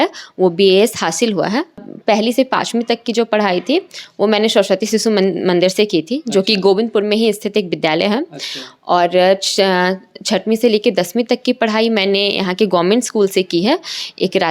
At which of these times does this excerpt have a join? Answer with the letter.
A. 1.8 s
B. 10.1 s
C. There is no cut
A